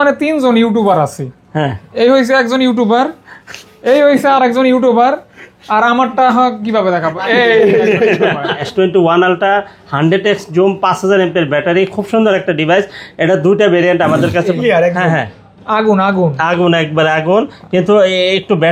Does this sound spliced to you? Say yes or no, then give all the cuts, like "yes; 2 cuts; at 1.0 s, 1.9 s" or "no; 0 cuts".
yes; 2 cuts; at 8.6 s, 14.5 s